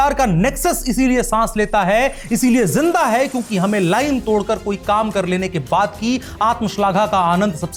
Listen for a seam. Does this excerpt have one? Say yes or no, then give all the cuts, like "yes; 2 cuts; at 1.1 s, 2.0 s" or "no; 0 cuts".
no; 0 cuts